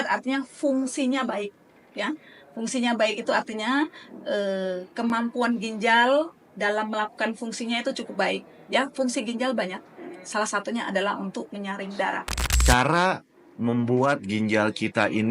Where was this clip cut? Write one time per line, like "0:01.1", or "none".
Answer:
0:12.4